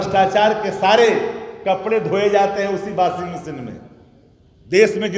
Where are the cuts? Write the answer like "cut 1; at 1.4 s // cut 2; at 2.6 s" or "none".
none

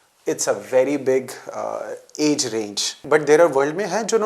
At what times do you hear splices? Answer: cut 1; at 2.9 s

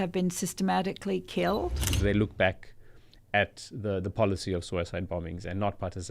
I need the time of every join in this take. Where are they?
cut 1; at 1.9 s

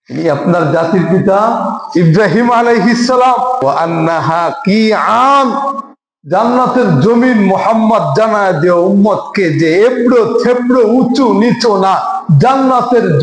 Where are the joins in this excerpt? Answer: cut 1; at 3.6 s

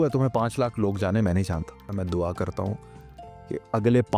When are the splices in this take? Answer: cut 1; at 1.9 s

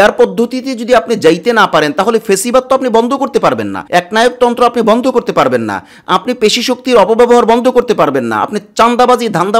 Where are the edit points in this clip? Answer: none

